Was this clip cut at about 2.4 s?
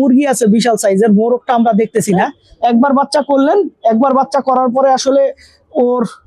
yes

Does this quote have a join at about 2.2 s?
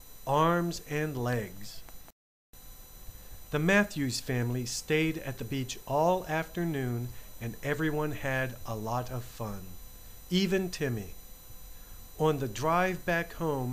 yes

